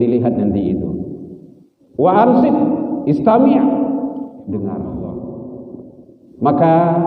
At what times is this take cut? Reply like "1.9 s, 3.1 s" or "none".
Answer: 5.5 s